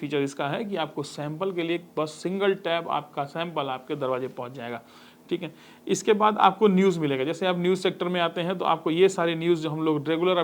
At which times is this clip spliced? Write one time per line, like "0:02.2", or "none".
none